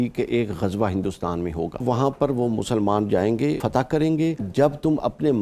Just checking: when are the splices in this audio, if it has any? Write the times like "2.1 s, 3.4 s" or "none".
1.8 s, 3.6 s, 4.5 s

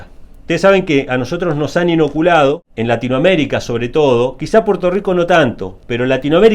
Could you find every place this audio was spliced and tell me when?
2.7 s

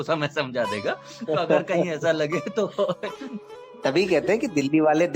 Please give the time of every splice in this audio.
3.8 s

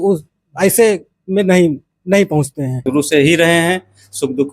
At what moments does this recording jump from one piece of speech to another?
2.7 s

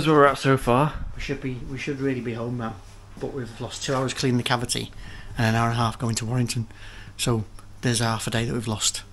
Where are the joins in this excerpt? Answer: none

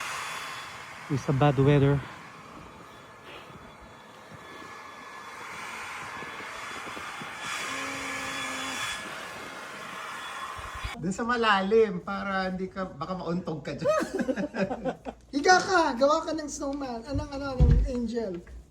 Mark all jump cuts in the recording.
11.0 s

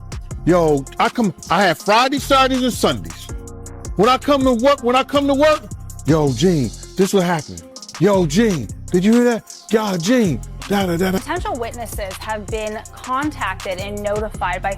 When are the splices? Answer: 11.2 s

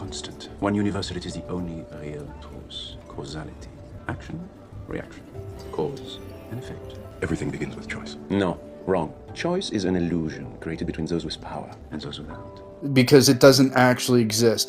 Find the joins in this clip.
none

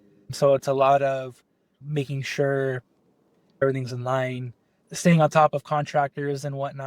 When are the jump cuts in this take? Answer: 3.6 s

